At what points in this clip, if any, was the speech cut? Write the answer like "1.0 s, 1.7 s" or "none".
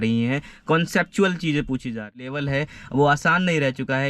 2.2 s